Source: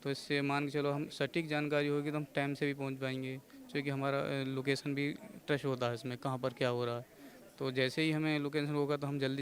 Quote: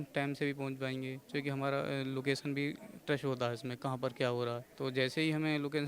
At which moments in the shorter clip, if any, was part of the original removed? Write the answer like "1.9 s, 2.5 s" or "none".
1.2 s, 4.7 s